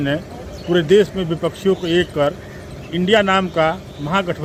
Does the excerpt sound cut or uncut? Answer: uncut